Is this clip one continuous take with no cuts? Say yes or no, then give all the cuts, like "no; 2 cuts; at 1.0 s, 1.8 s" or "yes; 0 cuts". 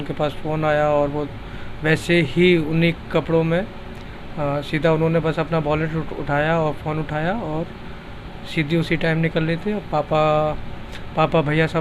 yes; 0 cuts